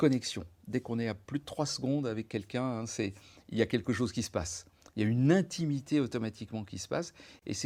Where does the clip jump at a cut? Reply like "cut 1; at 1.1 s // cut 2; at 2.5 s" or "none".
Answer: none